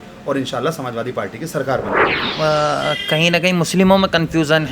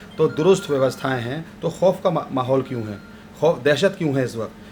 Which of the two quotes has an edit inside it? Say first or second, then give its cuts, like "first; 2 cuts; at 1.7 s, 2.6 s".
first; 1 cut; at 2.2 s